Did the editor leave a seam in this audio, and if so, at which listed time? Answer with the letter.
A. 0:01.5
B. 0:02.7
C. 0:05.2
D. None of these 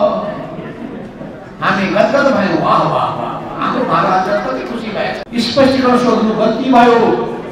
C